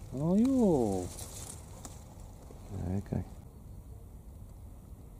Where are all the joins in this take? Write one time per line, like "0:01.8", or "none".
0:03.4